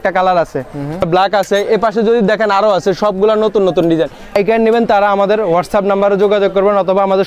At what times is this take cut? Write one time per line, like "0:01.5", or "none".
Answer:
0:01.1
0:04.3